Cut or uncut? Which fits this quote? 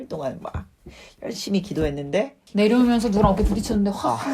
cut